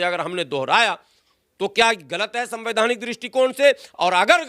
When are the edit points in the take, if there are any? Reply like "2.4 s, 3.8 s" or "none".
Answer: none